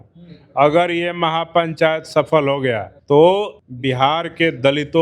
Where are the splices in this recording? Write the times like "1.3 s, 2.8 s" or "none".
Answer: 2.9 s, 3.6 s

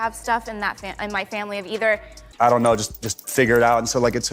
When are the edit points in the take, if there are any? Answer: 2.2 s

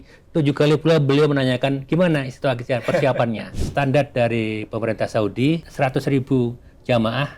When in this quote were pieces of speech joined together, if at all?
3.6 s, 5.7 s

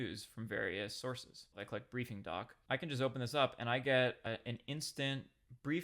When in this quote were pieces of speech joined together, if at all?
1.6 s, 2.6 s

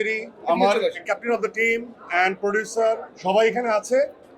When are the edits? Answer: 1.0 s, 3.1 s

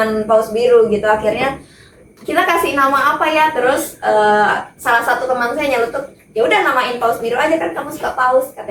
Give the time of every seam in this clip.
none

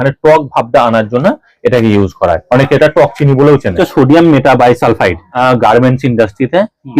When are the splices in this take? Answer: 3.8 s, 5.3 s

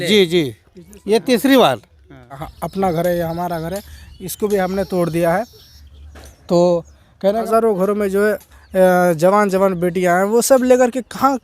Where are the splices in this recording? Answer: 2.5 s, 7.4 s

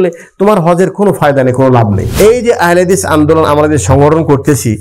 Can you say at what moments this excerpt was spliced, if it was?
2.0 s

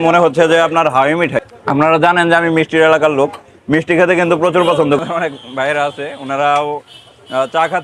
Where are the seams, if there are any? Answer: 1.4 s, 5.0 s

